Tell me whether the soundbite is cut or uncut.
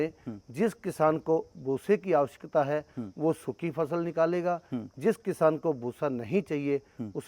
uncut